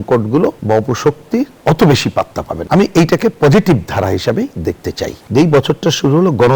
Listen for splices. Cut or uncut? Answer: cut